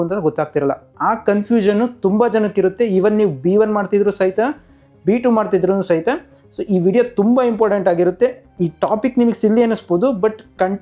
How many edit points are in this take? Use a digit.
0